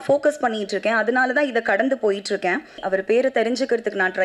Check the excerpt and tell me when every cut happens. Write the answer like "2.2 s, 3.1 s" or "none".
2.8 s